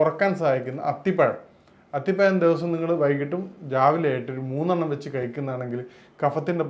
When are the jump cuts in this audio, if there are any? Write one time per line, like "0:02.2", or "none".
none